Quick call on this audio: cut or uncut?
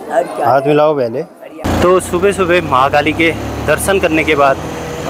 cut